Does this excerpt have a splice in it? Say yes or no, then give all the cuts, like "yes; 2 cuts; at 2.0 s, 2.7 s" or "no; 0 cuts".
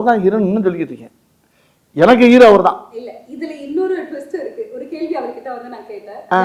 no; 0 cuts